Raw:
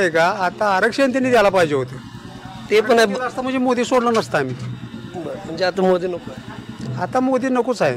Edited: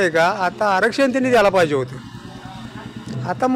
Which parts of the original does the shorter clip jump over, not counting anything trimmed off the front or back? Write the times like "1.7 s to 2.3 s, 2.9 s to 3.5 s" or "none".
2.5 s to 6.3 s